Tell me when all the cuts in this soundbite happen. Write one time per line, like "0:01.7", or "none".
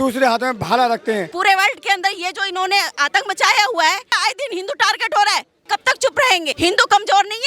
0:01.3
0:04.2
0:05.6
0:06.5